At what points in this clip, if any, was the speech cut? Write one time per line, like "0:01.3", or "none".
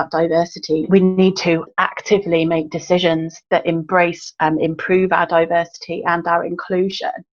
0:00.9
0:01.7
0:03.3
0:04.2